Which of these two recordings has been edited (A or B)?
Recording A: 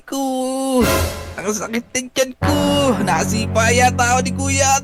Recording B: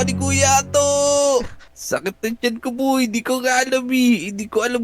B